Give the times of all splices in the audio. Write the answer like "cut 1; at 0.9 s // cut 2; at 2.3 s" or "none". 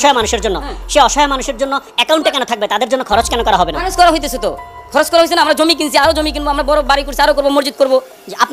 none

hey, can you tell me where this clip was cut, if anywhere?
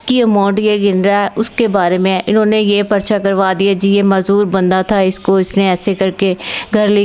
none

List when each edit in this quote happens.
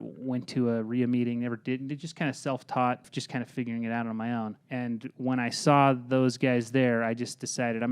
cut 1; at 3.1 s // cut 2; at 4.6 s

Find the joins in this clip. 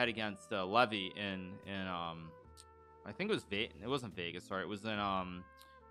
none

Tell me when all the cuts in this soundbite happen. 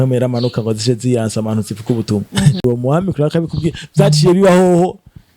cut 1; at 2.6 s

